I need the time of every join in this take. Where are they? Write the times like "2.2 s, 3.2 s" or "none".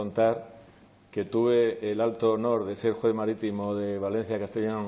none